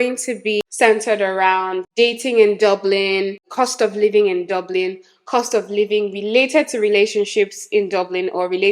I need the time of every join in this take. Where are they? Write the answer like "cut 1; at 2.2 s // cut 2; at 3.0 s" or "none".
none